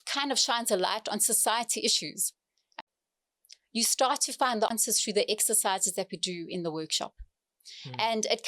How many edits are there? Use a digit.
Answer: 2